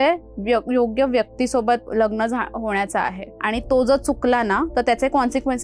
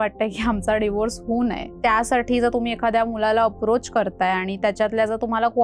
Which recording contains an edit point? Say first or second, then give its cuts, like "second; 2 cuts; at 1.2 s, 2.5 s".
second; 1 cut; at 1.7 s